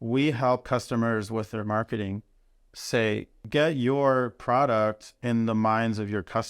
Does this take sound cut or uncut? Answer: cut